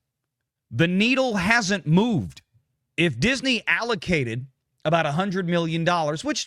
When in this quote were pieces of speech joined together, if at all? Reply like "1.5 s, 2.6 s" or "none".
none